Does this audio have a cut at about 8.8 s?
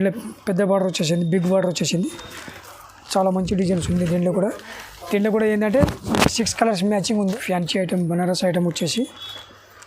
no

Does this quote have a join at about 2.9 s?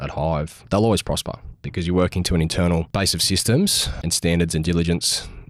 yes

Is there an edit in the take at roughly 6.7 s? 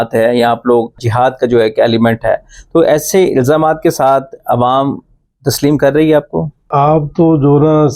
yes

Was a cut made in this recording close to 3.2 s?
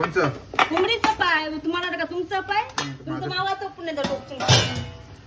no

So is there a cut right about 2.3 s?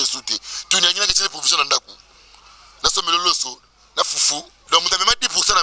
no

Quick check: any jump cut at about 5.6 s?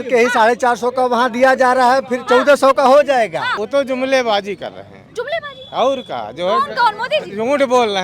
no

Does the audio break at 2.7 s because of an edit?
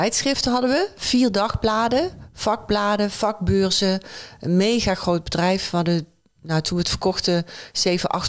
no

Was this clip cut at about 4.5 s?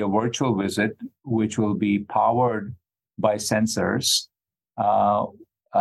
no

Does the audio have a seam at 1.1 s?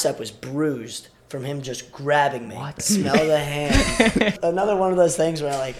no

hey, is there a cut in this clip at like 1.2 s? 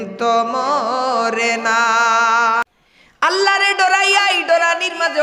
no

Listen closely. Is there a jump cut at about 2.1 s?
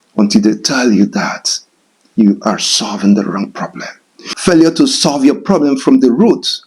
no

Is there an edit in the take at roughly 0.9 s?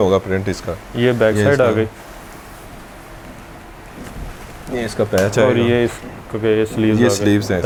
no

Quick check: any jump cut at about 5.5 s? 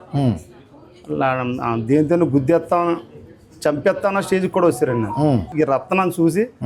yes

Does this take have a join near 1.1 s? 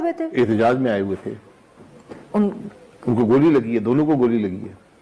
no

